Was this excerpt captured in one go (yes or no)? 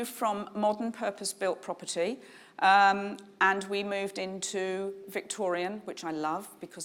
yes